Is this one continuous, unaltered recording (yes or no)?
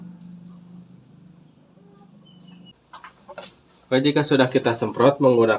no